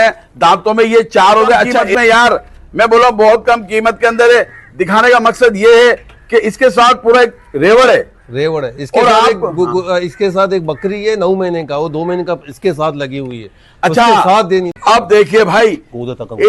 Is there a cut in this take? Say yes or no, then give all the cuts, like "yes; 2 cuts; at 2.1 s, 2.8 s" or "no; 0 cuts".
yes; 2 cuts; at 1.9 s, 14.7 s